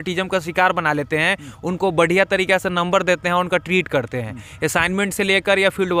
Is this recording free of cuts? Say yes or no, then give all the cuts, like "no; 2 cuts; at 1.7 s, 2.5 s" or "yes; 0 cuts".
yes; 0 cuts